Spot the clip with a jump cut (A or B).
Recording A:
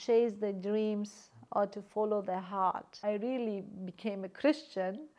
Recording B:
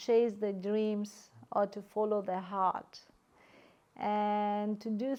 A